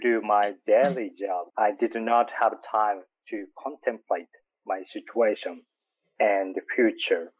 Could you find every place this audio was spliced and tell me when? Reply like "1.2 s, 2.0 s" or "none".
1.5 s